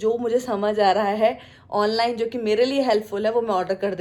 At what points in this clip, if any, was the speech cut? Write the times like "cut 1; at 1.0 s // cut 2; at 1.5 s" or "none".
none